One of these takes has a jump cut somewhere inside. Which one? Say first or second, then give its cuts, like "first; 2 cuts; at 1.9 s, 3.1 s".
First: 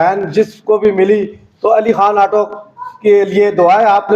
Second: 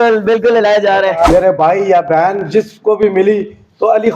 second; 1 cut; at 1.3 s